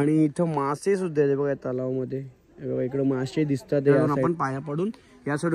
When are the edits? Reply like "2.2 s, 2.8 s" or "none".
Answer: 4.1 s